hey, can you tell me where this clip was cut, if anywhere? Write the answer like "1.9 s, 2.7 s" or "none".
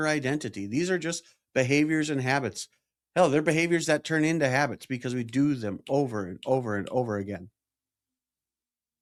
none